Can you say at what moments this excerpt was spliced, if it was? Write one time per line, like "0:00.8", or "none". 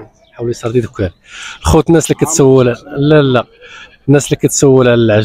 none

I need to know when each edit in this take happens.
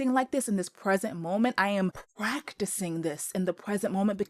0:02.1

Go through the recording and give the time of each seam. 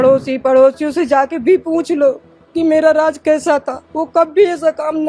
none

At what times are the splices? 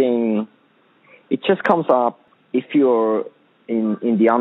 0:02.3

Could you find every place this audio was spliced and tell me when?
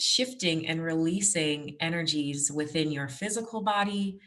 none

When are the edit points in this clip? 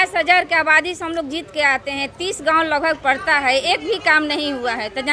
none

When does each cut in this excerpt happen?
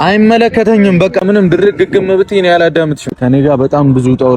0:01.2
0:03.1

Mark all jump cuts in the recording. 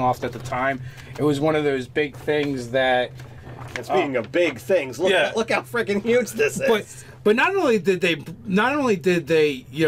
0:08.6

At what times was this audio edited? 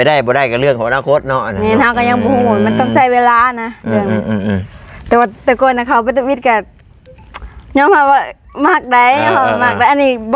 none

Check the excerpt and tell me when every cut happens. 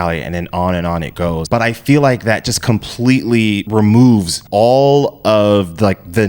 0:01.4
0:03.6
0:04.4

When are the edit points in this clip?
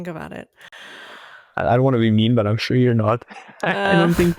none

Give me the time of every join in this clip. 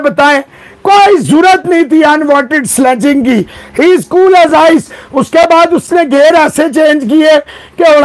none

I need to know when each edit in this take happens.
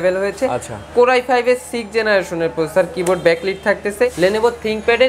0:04.1

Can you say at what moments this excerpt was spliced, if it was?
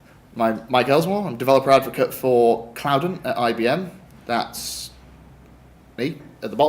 0:01.0

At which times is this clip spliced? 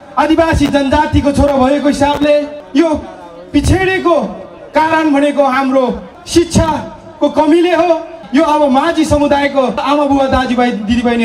0:08.2

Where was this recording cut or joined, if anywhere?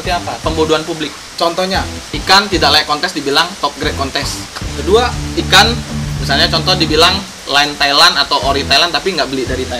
0:02.0
0:04.6
0:05.2

